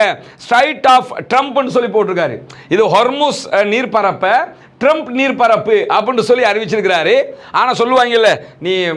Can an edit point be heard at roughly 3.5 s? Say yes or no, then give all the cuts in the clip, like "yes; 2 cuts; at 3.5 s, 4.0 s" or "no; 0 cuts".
no; 0 cuts